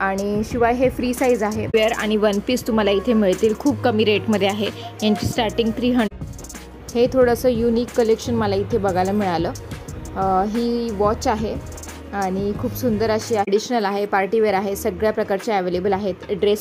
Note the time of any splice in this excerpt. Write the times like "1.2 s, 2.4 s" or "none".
1.7 s, 6.1 s, 13.5 s